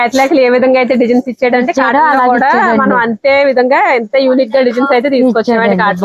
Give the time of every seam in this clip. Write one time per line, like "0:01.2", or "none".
none

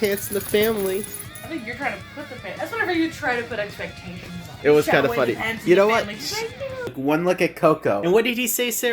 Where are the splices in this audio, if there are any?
0:06.9

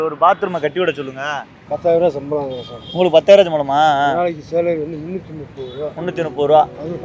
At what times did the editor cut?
0:01.7

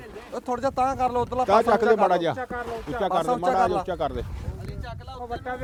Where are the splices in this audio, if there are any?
none

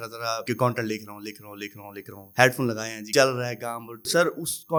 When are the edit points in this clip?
none

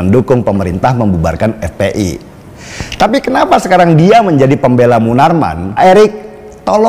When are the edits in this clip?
0:05.8

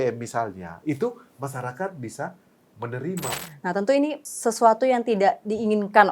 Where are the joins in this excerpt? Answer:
0:03.4
0:04.3

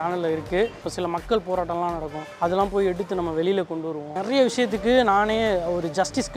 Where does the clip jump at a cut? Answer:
0:00.8
0:04.1

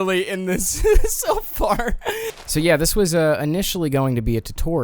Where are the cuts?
0:02.2

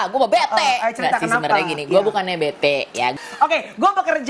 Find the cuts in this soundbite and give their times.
0:03.1

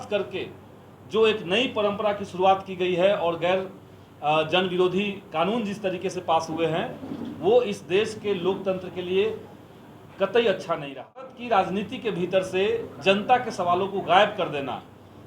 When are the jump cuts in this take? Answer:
0:11.4

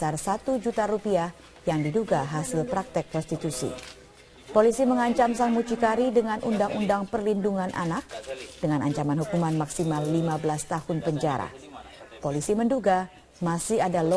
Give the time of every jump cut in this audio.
none

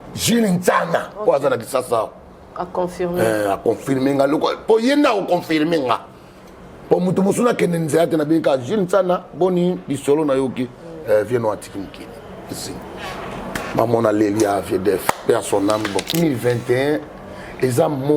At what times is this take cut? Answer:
0:16.1

